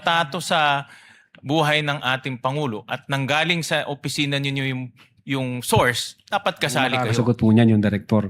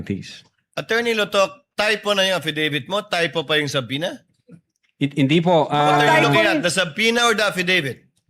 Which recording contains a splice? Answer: first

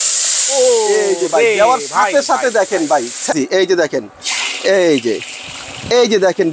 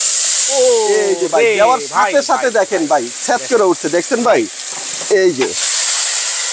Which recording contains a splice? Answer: first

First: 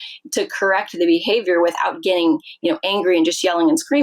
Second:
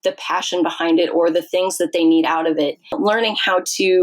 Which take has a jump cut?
second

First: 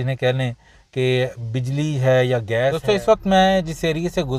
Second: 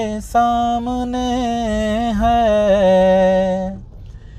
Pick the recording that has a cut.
first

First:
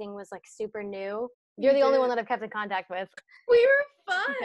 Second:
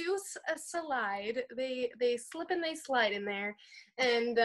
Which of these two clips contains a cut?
first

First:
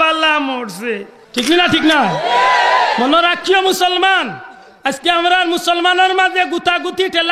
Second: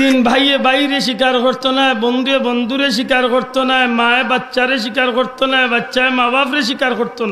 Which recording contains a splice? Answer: first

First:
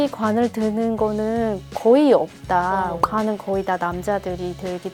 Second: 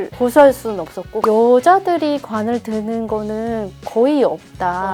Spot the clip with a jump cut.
second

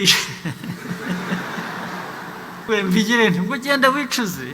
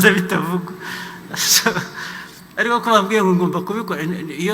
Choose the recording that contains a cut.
first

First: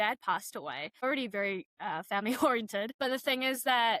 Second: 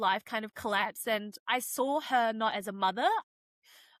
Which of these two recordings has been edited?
first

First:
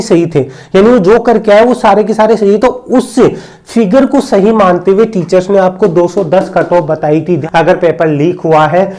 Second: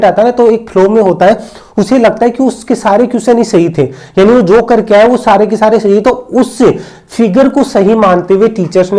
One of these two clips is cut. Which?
first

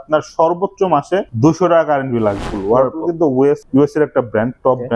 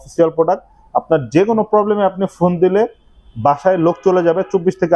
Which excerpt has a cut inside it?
first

